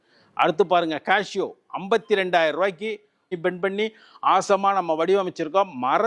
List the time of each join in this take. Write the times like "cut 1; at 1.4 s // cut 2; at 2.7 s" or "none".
cut 1; at 3.3 s